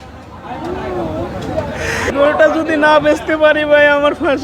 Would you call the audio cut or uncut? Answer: cut